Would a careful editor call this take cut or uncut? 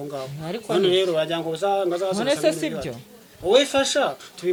uncut